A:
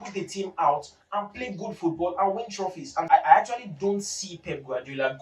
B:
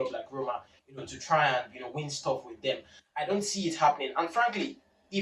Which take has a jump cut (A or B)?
A